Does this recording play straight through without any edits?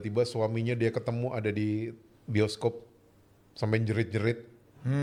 yes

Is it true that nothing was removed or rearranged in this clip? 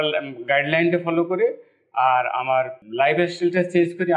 yes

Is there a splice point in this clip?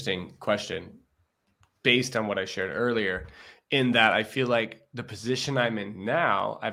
no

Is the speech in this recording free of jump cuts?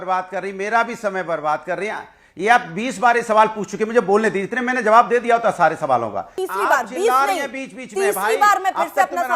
no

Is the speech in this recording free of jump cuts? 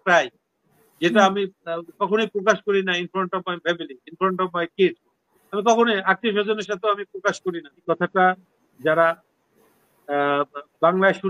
no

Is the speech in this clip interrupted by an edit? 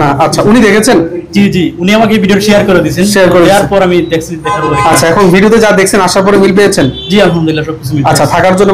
no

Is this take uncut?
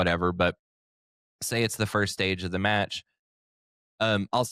yes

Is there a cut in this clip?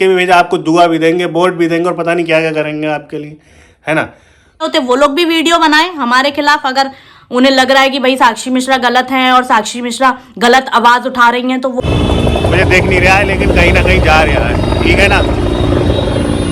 yes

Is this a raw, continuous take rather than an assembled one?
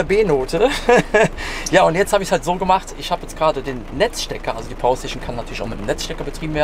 yes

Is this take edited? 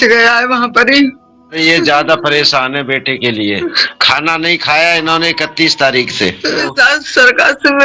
yes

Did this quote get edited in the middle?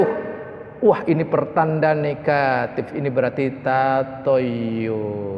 no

